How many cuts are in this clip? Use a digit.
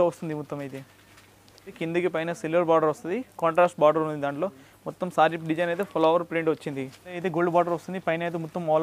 2